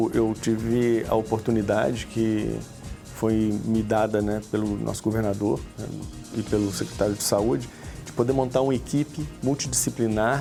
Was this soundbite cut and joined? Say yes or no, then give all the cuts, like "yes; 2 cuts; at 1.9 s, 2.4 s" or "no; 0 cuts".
no; 0 cuts